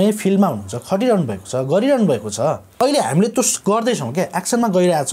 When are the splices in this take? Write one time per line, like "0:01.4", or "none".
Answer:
0:02.8

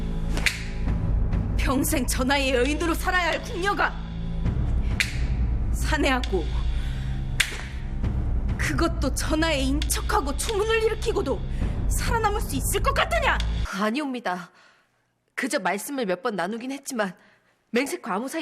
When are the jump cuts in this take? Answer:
0:13.6

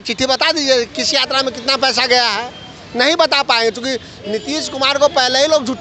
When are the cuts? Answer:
none

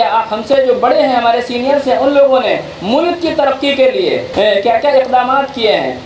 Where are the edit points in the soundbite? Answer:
0:04.2

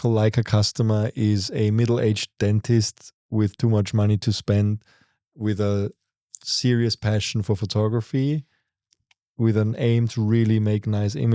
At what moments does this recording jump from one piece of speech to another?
none

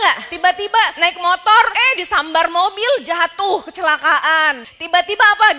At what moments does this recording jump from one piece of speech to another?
0:04.6

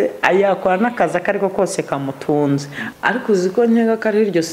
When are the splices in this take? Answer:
0:02.8

